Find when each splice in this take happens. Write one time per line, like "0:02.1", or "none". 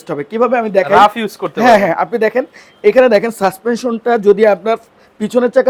none